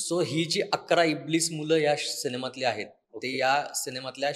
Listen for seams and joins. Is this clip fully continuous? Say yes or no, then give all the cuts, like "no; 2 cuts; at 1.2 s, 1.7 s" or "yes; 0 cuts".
yes; 0 cuts